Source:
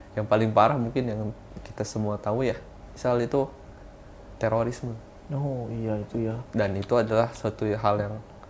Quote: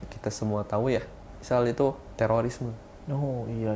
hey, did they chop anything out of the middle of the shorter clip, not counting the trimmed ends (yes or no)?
yes